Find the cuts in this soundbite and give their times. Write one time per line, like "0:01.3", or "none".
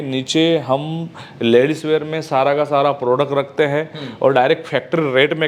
none